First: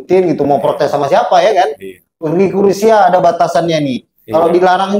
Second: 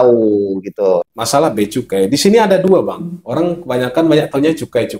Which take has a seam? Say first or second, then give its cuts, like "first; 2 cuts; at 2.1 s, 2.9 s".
second; 1 cut; at 1.1 s